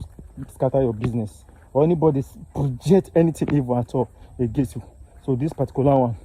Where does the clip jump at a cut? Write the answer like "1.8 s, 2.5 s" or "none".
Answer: none